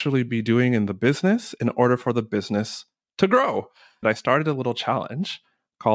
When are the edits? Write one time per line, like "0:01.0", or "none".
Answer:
0:04.0